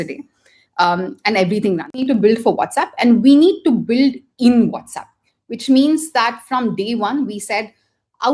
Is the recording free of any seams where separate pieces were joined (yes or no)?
no